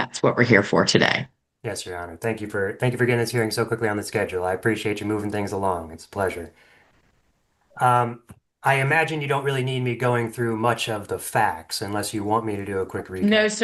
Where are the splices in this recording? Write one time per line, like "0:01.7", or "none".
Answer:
none